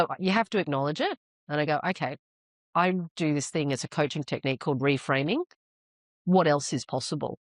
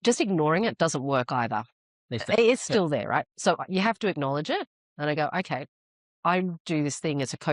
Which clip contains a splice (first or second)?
second